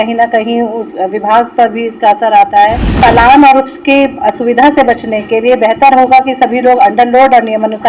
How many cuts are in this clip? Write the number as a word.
one